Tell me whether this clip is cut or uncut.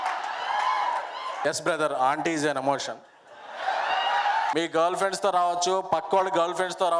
cut